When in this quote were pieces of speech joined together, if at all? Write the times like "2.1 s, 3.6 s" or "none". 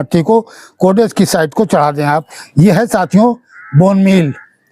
2.4 s